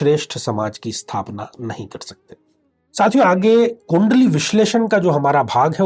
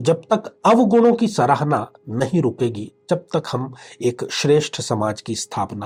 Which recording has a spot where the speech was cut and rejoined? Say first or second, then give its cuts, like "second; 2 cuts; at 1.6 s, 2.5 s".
first; 1 cut; at 2.7 s